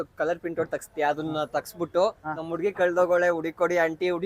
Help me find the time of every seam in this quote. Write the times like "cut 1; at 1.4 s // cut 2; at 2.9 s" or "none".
none